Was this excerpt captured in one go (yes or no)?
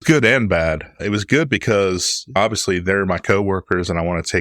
no